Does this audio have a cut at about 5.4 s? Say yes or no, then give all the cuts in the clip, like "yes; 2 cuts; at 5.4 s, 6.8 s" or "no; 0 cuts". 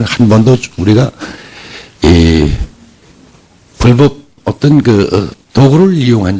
yes; 1 cut; at 5.4 s